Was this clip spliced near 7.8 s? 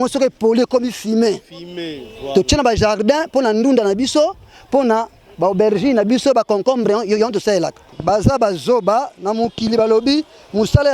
yes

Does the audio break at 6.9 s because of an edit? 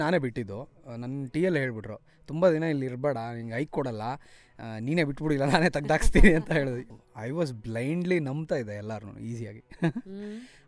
yes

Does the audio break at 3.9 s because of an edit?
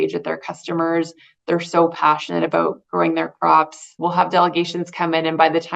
yes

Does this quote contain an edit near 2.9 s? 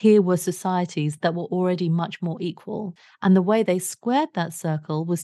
yes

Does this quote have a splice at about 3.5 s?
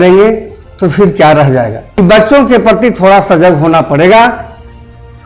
no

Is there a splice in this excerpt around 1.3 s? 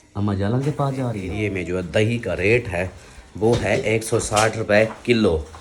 yes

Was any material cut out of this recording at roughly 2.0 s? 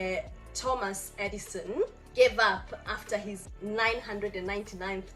yes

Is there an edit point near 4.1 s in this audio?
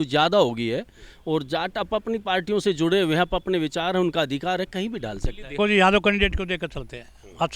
no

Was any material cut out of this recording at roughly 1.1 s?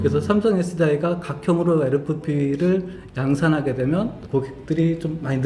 no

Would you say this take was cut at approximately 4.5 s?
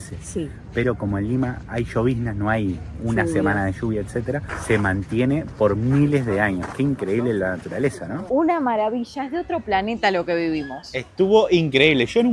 yes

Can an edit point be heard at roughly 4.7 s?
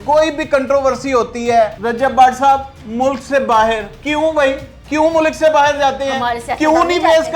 yes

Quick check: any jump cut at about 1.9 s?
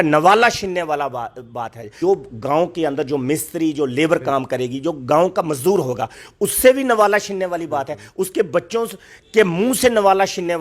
yes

